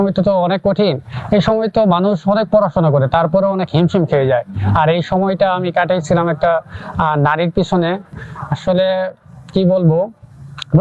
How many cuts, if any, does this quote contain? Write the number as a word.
zero